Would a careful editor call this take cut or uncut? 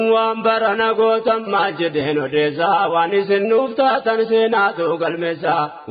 uncut